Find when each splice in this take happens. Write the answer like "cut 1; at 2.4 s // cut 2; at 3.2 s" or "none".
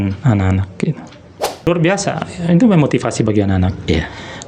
cut 1; at 1.7 s